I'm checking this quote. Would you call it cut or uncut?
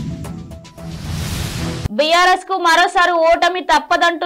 cut